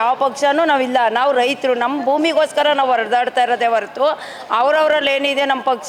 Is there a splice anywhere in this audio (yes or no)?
no